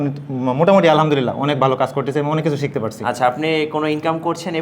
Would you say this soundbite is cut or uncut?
uncut